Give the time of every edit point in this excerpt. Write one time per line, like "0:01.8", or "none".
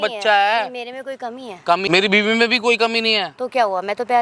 0:01.9